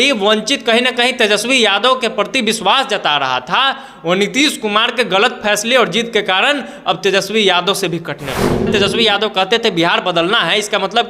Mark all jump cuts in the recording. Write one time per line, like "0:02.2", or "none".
0:08.7